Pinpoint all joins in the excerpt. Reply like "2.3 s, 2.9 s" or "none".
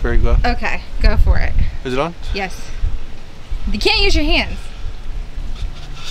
none